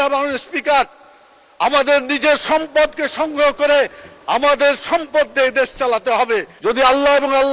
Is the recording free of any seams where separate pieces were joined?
no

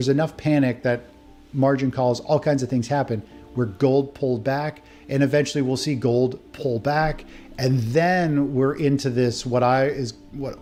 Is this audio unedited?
yes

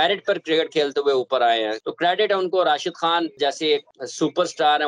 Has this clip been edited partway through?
yes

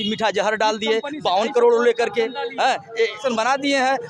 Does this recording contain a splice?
yes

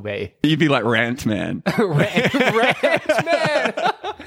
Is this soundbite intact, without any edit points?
yes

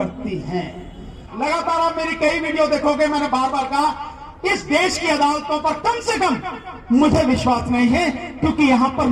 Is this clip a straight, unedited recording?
no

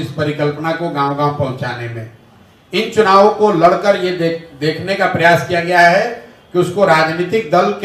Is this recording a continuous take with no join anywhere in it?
yes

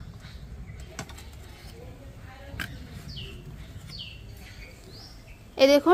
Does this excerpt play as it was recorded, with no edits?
no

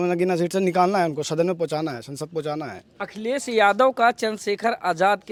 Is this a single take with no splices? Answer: yes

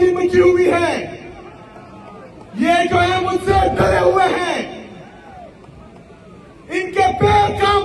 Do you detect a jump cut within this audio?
no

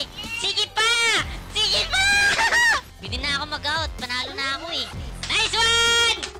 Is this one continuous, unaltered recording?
no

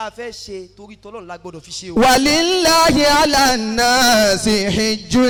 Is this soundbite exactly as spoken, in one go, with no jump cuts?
yes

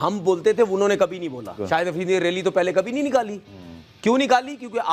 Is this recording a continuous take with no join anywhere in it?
no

